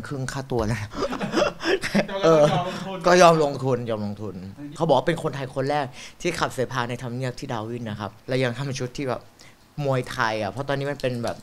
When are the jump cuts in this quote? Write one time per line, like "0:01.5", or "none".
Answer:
0:04.7
0:08.1

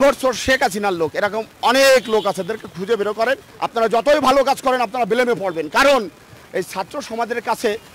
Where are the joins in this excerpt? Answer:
0:03.5
0:06.4

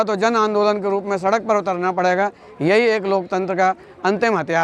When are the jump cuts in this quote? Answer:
none

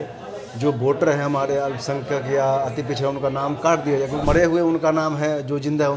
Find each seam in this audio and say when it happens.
0:04.2

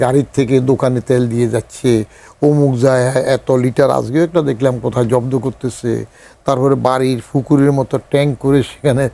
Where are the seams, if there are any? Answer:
none

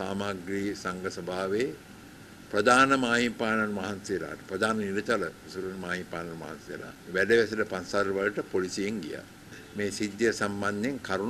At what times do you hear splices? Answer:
0:06.9
0:09.6

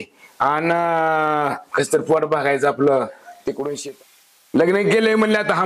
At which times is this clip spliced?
0:03.8

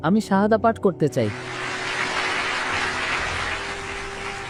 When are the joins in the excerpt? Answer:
none

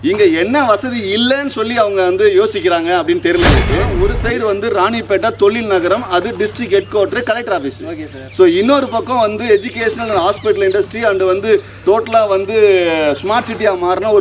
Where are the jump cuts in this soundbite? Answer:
0:03.9

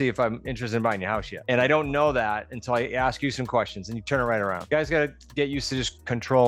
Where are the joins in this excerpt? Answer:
0:01.3
0:04.6

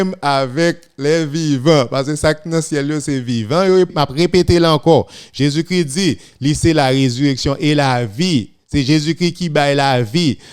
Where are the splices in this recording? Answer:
0:03.9

